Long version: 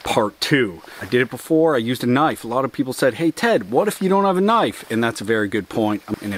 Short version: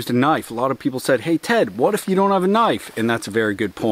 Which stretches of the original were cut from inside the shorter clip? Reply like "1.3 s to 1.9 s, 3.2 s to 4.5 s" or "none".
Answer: none